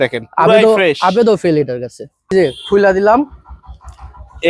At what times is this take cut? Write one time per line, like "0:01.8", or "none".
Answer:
0:02.3